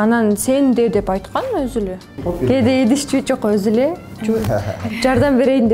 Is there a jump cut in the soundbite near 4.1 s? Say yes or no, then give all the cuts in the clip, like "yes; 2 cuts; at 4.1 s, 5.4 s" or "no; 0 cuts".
no; 1 cut; at 2.2 s